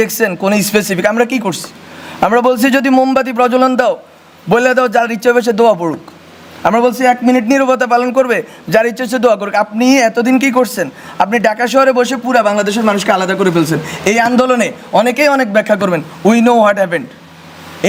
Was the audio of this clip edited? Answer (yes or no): no